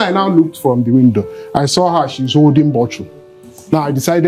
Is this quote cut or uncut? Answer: uncut